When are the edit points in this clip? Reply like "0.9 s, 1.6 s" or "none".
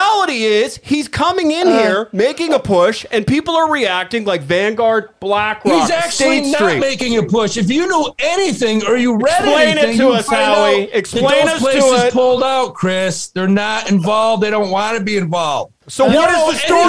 15.8 s